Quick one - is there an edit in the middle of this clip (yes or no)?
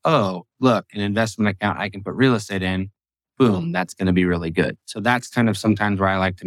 no